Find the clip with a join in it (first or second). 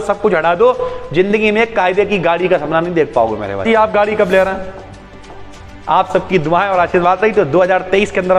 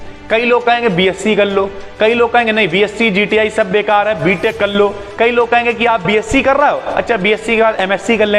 first